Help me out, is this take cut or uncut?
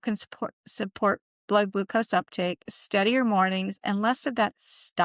uncut